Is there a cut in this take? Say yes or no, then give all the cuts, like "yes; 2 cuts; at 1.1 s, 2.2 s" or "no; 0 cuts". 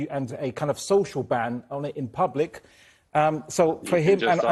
no; 0 cuts